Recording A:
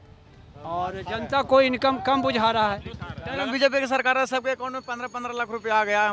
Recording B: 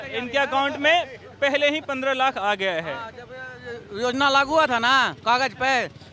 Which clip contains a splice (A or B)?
A